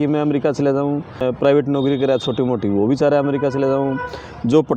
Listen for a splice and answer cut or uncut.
cut